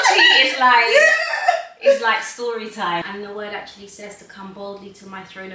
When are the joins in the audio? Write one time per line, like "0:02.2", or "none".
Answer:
0:03.0